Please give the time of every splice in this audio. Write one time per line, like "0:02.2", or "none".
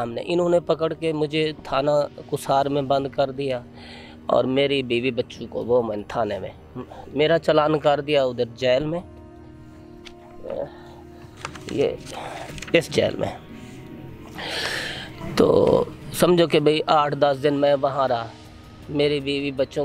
none